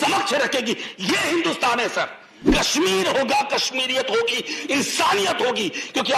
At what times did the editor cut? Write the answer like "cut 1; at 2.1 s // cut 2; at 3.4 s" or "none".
cut 1; at 2.5 s